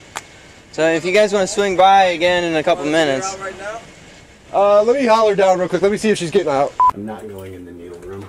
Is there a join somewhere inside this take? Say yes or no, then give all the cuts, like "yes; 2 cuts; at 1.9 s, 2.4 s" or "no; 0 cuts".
yes; 1 cut; at 6.9 s